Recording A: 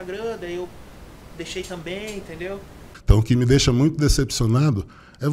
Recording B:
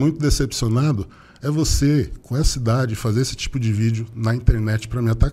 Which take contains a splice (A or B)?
A